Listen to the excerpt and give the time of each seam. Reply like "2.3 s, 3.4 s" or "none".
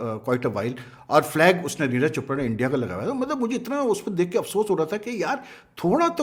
none